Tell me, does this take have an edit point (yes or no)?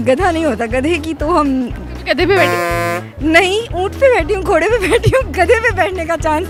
no